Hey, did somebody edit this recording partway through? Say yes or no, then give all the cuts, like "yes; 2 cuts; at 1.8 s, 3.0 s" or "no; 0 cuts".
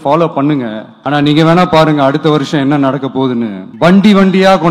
yes; 2 cuts; at 0.9 s, 3.6 s